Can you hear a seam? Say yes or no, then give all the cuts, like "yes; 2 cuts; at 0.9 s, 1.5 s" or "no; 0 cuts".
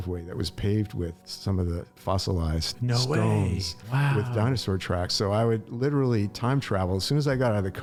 no; 0 cuts